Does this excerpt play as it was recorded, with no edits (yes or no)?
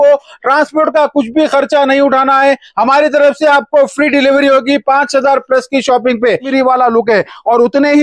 no